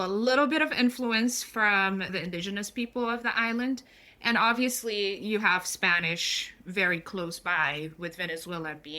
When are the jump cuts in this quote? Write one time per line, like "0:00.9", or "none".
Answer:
0:02.1